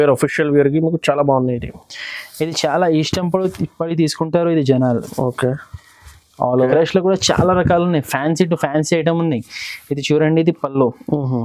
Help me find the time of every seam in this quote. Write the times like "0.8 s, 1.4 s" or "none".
6.7 s